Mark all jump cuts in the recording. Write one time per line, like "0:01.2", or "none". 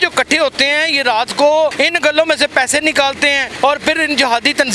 0:01.7
0:03.5

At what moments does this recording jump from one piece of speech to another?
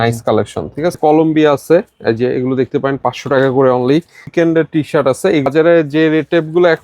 0:01.0
0:04.3
0:05.5

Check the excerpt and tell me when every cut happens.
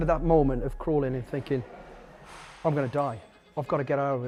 none

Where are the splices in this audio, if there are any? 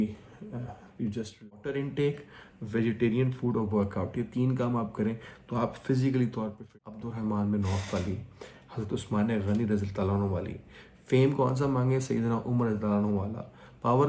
0:01.4
0:06.6

